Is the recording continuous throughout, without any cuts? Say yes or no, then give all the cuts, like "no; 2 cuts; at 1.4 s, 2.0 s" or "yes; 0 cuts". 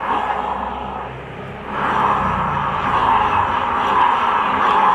yes; 0 cuts